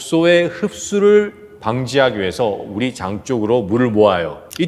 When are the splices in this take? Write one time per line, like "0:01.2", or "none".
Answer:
none